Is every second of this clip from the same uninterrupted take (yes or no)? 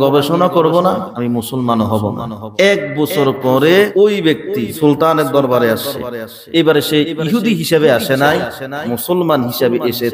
no